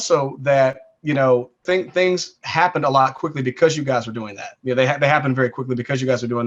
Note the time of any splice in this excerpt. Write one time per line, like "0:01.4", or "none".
0:01.6

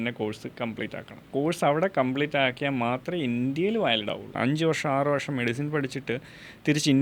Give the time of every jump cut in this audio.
0:01.2
0:04.3

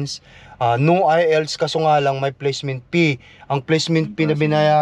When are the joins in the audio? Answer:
none

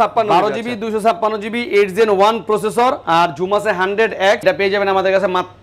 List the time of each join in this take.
0:04.4

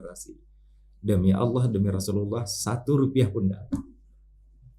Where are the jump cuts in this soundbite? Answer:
none

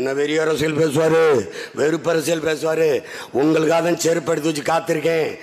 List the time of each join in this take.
none

